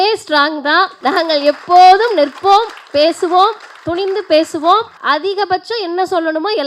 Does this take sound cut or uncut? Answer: cut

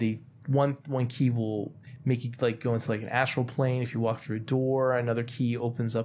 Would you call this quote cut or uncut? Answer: uncut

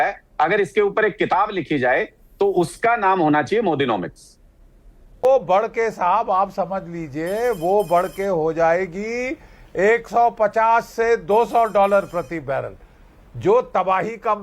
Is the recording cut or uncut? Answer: cut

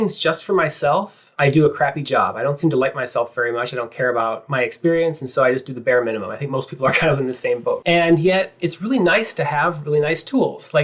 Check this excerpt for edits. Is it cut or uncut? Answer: cut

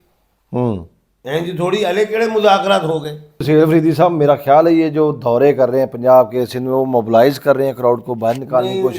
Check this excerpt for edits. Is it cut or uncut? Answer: cut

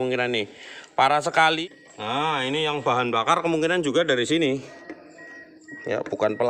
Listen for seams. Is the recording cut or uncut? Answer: cut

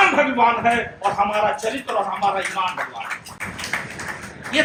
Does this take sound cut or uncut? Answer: uncut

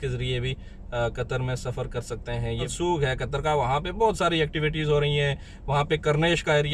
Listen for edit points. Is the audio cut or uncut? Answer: cut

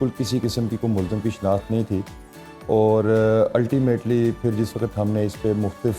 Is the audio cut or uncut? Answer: uncut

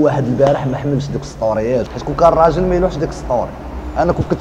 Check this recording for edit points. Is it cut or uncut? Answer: cut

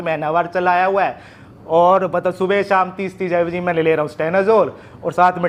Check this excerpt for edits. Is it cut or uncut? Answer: uncut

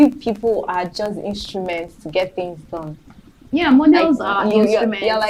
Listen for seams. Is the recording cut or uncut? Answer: uncut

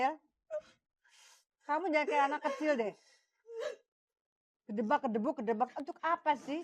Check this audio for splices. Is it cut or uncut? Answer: uncut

